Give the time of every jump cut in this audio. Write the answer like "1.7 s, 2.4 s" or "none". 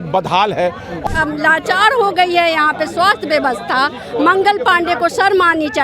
0.9 s